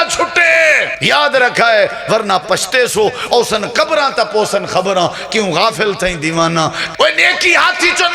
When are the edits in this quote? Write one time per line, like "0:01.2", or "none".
0:00.9
0:06.8